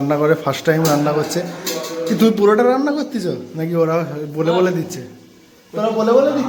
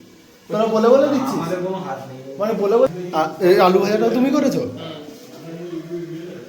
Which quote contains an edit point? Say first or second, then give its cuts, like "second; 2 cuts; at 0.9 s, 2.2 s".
second; 1 cut; at 2.9 s